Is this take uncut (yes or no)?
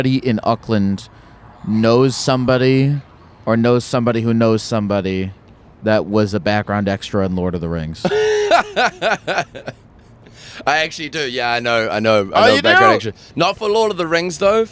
yes